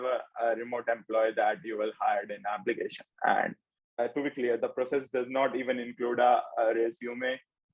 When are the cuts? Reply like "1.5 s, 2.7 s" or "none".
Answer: 3.8 s